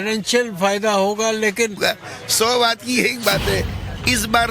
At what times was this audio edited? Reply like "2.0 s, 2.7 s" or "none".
1.8 s